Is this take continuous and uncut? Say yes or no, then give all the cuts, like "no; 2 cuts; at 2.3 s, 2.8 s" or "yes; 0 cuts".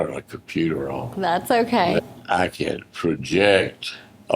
no; 1 cut; at 2.6 s